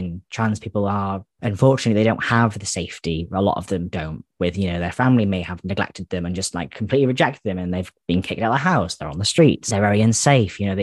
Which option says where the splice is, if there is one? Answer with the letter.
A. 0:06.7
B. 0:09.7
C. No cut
B